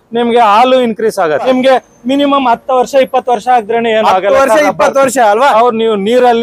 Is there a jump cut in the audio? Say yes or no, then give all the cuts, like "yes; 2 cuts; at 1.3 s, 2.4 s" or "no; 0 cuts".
yes; 1 cut; at 1.5 s